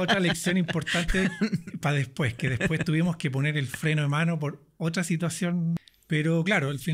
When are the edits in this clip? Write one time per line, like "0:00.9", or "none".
0:05.8